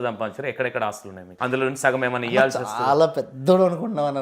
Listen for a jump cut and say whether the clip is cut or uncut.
cut